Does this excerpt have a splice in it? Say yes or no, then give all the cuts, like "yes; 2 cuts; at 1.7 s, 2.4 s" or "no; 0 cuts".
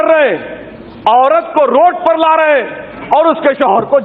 no; 0 cuts